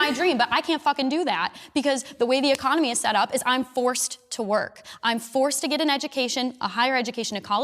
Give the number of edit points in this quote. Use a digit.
1